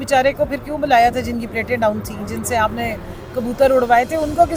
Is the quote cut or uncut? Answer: uncut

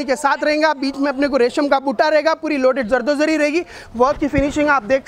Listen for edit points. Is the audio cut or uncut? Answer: cut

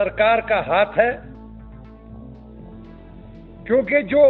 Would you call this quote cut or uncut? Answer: cut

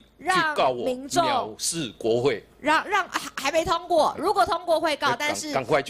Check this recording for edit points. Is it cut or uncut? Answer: uncut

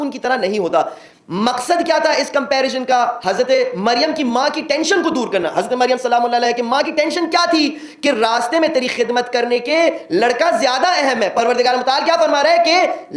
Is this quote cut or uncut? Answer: uncut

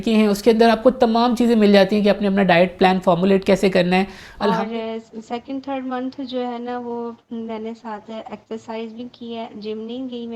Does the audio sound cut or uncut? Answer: cut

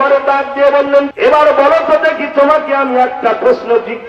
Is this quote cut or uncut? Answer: cut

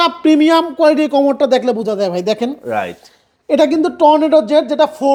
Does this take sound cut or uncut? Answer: uncut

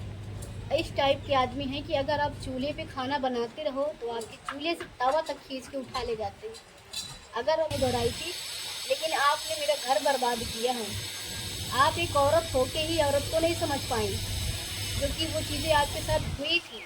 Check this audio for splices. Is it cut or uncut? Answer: cut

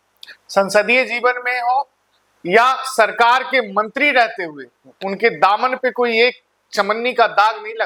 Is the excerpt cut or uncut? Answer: uncut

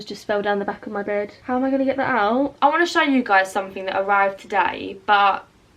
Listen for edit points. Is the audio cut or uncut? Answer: cut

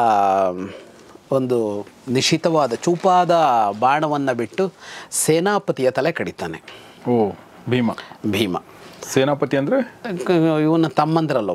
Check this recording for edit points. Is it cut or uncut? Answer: uncut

